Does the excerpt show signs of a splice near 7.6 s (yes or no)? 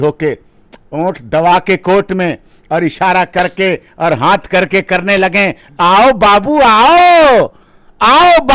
no